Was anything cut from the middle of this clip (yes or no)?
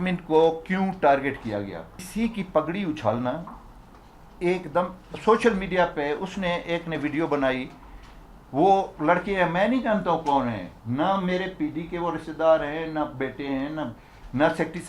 yes